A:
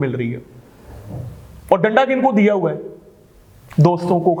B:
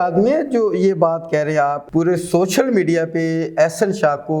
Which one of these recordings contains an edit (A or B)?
B